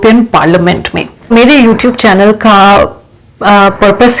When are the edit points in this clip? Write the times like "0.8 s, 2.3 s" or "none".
1.3 s